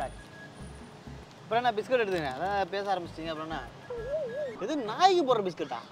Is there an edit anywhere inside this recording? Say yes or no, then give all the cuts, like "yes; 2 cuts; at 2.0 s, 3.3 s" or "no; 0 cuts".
yes; 1 cut; at 4.5 s